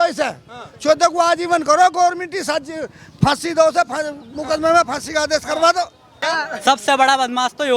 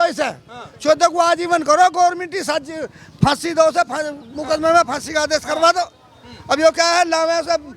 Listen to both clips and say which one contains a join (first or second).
first